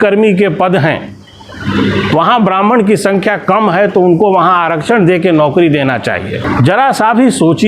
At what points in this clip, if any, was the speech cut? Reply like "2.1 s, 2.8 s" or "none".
6.4 s